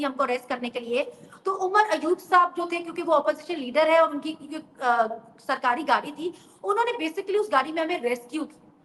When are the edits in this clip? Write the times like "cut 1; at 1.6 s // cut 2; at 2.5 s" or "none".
none